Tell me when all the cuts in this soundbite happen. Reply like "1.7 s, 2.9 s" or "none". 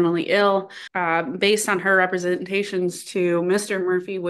1.1 s